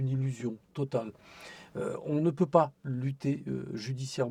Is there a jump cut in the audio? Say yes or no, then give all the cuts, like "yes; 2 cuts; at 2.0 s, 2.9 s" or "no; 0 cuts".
no; 0 cuts